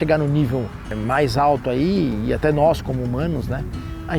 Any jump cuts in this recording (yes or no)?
yes